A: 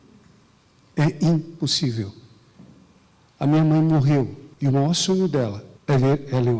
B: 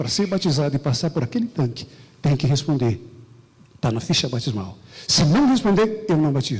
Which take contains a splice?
A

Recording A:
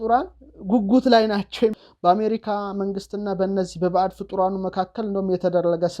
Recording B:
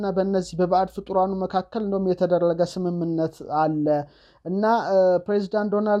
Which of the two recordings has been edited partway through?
A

